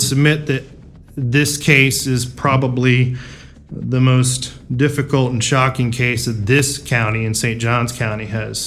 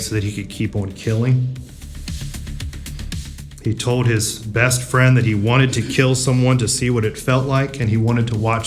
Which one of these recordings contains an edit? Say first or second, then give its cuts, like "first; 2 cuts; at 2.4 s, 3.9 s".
second; 2 cuts; at 1.9 s, 3.4 s